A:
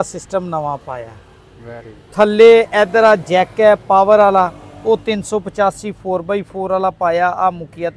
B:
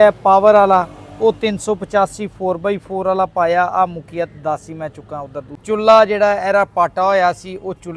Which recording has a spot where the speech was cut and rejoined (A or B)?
B